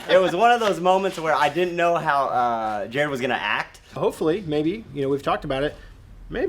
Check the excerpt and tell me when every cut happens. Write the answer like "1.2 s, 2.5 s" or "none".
4.0 s